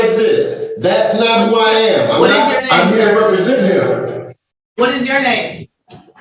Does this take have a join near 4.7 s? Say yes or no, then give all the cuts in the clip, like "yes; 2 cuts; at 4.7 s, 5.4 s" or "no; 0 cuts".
no; 1 cut; at 2.6 s